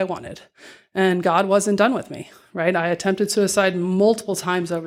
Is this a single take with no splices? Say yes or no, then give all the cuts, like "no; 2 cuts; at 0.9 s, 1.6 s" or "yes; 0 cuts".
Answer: yes; 0 cuts